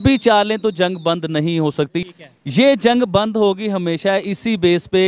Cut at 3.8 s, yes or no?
no